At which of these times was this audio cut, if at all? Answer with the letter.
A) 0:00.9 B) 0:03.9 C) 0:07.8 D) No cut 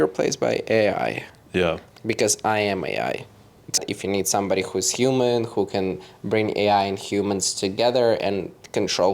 B